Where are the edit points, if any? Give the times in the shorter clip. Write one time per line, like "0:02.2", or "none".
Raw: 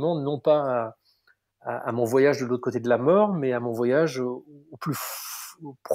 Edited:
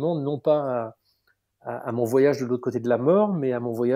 none